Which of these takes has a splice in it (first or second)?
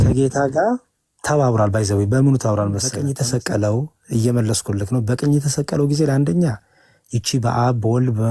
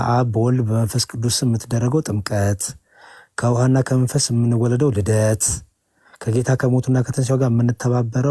first